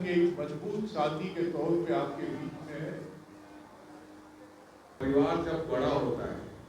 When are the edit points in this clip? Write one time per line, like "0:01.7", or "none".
0:04.9